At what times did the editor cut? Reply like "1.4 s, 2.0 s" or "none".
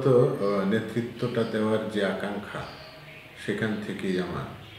none